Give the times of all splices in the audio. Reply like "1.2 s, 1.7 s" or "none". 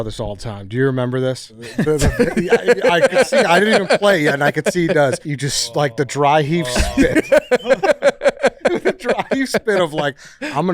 1.6 s, 5.3 s